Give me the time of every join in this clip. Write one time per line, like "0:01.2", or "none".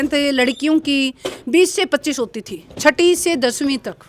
none